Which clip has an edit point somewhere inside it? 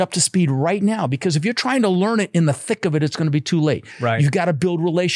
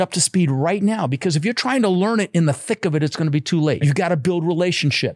second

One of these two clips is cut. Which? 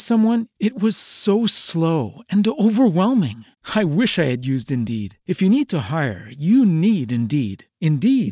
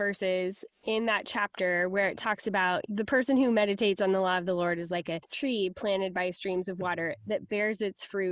second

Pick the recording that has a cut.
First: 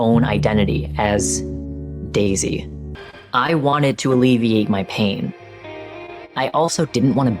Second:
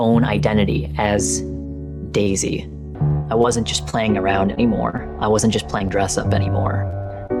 first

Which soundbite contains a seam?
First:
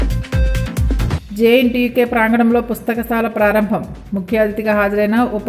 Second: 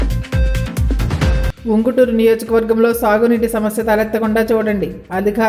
second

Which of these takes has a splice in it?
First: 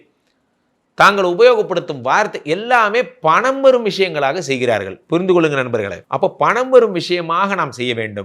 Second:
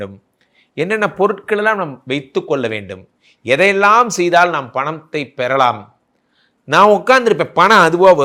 first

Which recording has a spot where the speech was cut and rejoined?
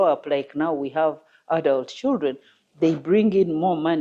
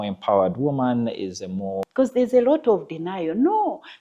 second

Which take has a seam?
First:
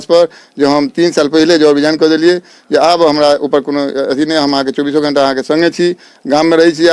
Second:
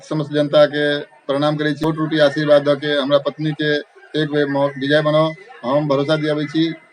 second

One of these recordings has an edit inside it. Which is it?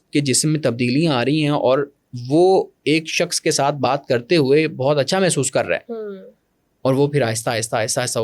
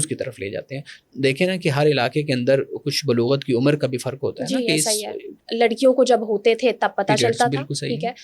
second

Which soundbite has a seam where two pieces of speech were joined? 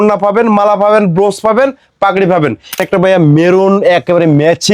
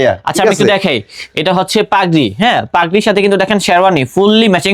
first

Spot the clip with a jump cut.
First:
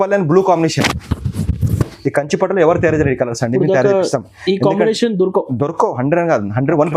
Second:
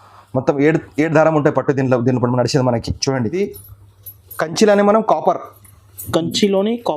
second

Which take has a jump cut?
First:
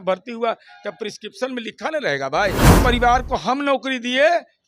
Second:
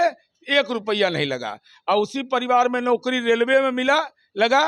first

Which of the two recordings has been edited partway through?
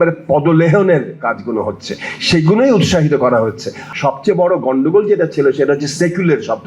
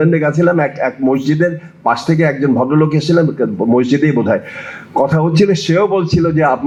first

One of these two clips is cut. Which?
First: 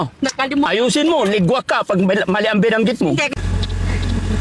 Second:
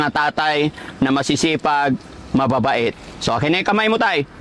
first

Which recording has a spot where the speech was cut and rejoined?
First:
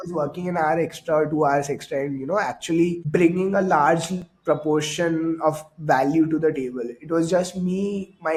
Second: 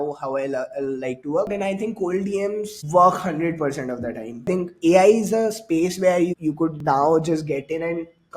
second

